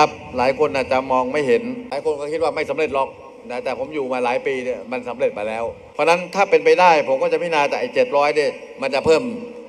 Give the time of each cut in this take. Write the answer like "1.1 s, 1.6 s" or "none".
1.9 s, 5.8 s